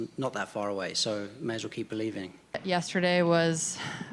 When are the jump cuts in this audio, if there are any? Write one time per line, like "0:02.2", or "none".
0:02.6